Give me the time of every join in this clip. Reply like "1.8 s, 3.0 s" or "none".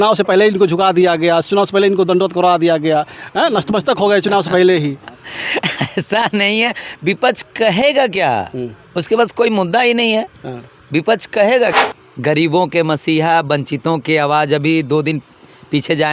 11.7 s